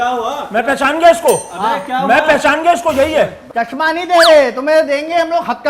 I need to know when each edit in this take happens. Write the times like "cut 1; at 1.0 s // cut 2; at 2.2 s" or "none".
cut 1; at 3.4 s